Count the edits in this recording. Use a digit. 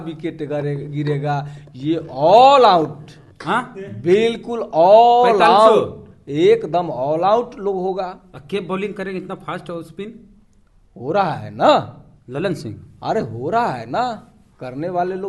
0